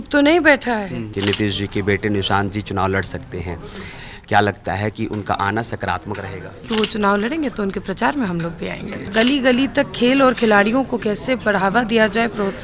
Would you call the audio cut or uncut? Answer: cut